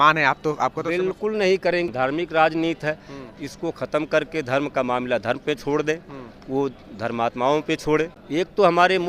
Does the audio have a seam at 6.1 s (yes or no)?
no